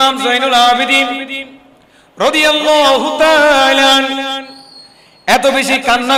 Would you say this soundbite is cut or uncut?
uncut